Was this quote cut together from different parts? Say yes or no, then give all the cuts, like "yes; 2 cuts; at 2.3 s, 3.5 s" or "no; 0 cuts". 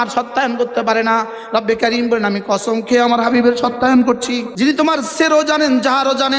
yes; 1 cut; at 4.5 s